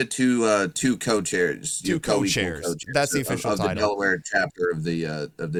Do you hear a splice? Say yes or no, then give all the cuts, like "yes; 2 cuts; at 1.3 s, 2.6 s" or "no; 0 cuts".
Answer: no; 0 cuts